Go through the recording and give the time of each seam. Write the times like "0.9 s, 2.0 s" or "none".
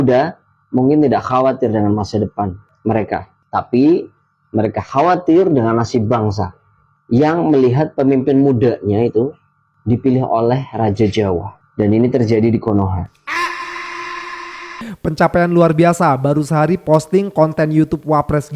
11.6 s, 14.8 s